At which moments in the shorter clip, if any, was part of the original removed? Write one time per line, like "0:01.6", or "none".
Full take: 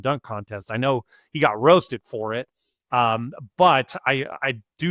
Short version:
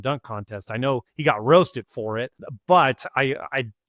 0:01.1
0:02.5

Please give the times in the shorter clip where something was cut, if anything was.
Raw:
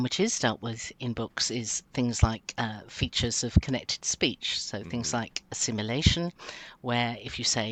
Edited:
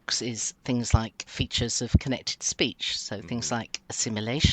0:01.2

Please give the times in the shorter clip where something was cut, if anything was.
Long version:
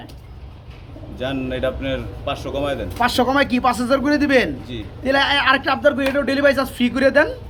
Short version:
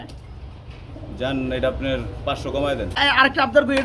0:03.0

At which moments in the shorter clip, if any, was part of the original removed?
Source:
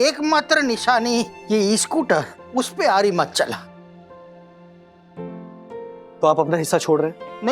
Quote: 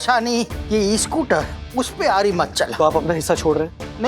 0:02.7

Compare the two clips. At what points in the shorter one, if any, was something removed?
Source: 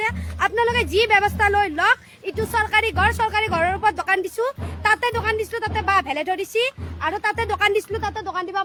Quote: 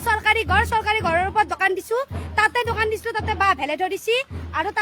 none

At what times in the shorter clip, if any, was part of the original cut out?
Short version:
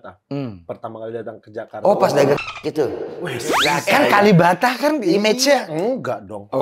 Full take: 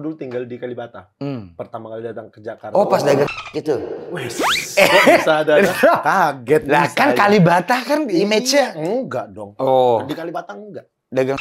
0:03.7

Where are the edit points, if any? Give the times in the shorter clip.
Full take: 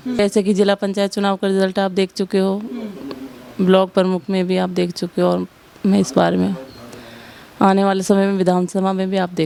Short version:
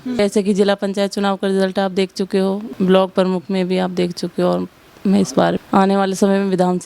0:02.7
0:05.6

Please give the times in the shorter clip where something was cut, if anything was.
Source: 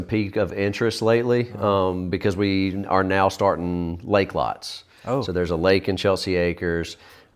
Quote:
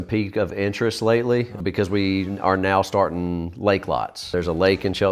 0:01.5
0:04.3

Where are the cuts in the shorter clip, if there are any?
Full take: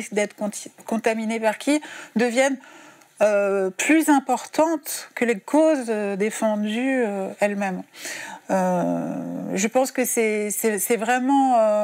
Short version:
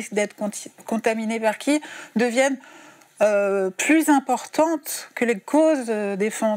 none

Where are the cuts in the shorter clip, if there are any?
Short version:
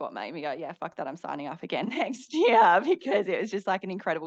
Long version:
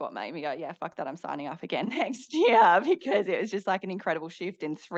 none

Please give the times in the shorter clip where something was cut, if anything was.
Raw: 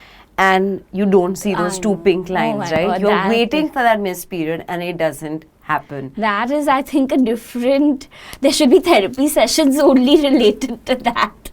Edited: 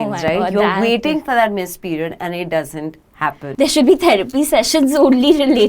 0:03.4

